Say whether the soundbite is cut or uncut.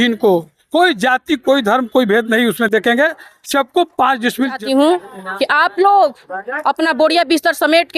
cut